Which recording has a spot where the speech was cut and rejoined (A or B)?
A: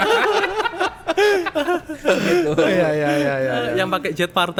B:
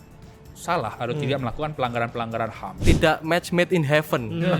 B